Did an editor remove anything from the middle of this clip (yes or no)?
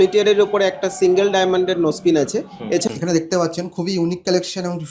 yes